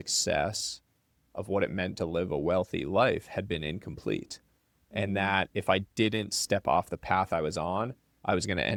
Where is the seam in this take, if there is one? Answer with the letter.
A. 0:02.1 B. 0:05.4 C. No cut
C